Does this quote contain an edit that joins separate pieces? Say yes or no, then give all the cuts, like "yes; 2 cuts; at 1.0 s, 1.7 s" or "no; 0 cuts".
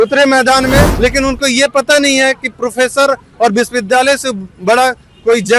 yes; 1 cut; at 0.9 s